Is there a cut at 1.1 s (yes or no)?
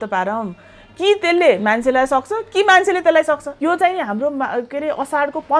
no